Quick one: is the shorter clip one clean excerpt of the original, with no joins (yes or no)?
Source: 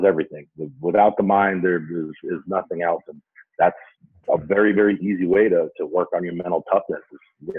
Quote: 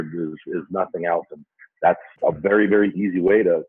no